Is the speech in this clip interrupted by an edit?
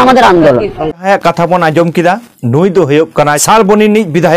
yes; 2 cuts; at 1.0 s, 3.4 s

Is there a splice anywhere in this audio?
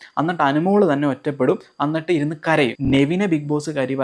yes; 1 cut; at 2.8 s

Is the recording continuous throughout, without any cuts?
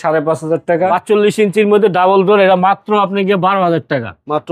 no; 1 cut; at 1.0 s

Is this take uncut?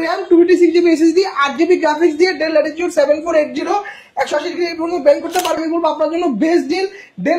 no; 1 cut; at 5.6 s

